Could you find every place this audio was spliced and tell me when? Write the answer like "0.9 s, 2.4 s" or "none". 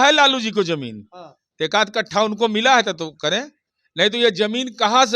none